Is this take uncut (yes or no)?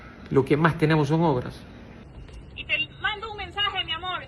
no